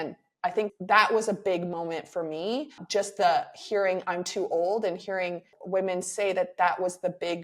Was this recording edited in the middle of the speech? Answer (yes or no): yes